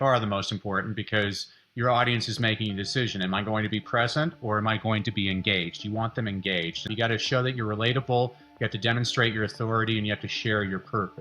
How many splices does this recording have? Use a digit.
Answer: 1